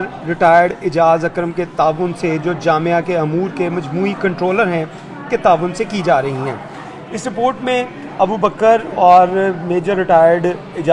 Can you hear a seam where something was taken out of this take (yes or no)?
no